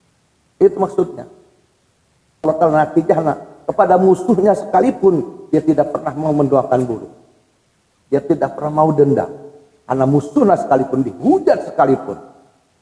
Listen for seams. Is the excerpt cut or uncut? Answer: cut